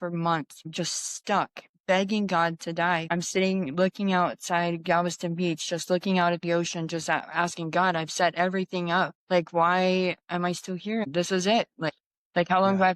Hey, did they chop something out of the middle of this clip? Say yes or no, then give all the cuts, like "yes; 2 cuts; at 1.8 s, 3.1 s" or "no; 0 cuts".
yes; 3 cuts; at 3.0 s, 9.2 s, 11.0 s